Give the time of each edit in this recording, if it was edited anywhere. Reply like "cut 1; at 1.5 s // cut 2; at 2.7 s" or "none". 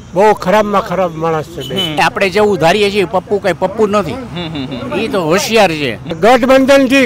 cut 1; at 1.9 s // cut 2; at 6.1 s